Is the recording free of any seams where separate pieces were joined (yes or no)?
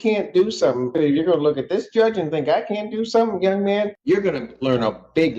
no